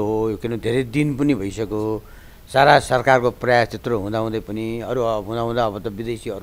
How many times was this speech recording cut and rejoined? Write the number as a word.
zero